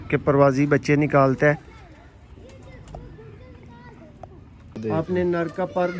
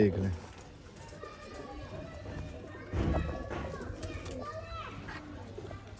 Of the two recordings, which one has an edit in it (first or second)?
first